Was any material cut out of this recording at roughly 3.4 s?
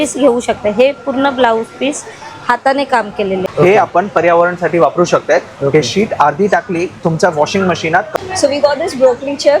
yes; 2 cuts; at 3.4 s, 8.1 s

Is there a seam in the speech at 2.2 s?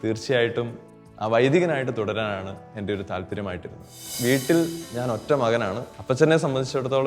no; 2 cuts; at 4.1 s, 5.9 s

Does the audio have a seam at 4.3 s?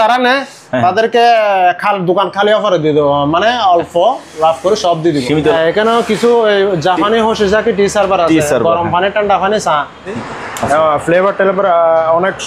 no; 2 cuts; at 5.5 s, 10.1 s

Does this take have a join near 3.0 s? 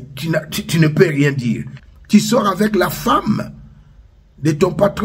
no; 1 cut; at 1.7 s

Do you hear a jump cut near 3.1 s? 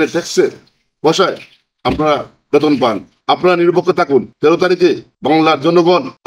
yes; 3 cuts; at 3.1 s, 4.3 s, 5.1 s

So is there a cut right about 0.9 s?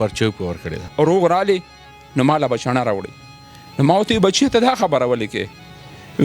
yes; 1 cut; at 0.9 s

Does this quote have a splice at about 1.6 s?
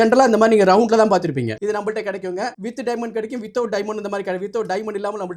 yes; 2 cuts; at 1.6 s, 2.6 s

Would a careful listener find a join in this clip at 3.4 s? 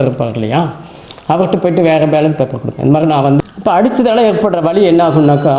yes; 1 cut; at 3.4 s

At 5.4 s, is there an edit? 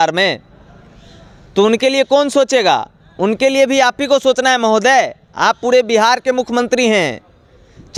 no; 0 cuts

